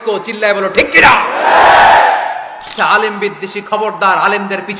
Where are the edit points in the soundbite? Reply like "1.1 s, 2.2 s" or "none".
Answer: 2.7 s